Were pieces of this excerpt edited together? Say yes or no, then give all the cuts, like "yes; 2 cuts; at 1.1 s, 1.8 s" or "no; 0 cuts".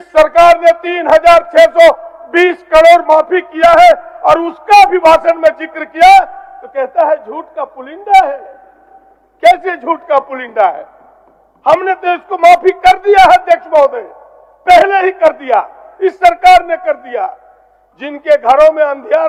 no; 0 cuts